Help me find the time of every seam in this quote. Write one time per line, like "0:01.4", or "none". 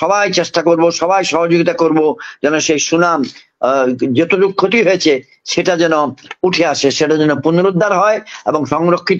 none